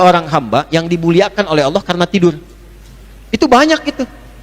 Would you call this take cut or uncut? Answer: cut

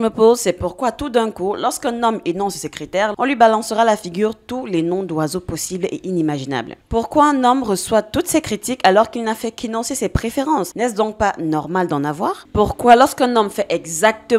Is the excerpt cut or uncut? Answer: cut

